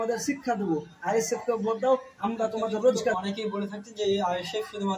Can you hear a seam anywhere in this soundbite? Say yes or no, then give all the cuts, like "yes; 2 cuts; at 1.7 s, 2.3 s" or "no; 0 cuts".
yes; 1 cut; at 3.2 s